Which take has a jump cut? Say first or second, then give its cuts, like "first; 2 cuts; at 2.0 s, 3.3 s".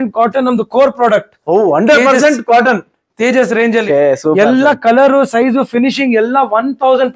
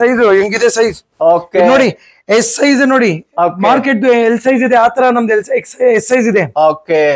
first; 1 cut; at 3.8 s